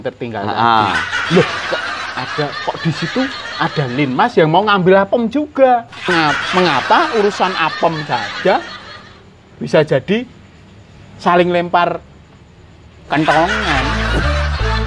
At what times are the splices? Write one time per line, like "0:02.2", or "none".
0:06.1
0:14.0